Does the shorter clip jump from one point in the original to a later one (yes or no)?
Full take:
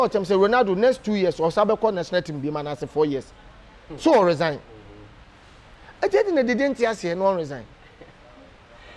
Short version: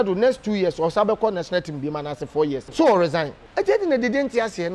yes